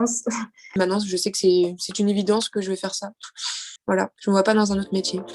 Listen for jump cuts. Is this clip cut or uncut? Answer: cut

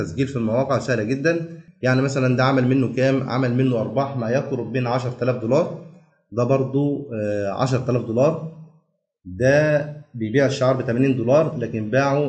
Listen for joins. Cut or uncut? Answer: cut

